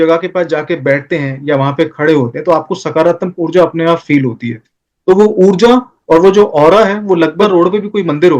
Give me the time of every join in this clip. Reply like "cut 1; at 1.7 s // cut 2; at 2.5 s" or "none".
cut 1; at 7.4 s